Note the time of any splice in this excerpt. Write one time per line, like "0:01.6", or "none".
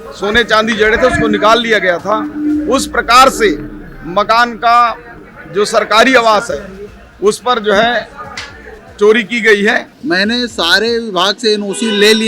0:09.9